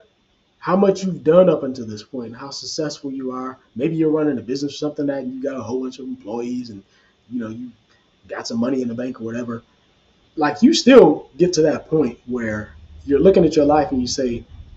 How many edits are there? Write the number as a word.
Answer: zero